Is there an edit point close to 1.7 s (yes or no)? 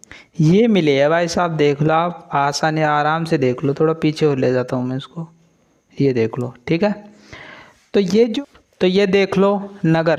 no